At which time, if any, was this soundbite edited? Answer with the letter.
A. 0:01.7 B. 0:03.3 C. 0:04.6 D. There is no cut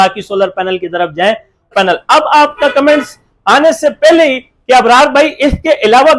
A